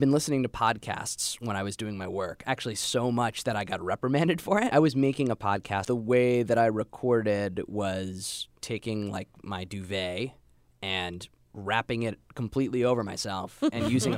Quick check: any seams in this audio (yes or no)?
yes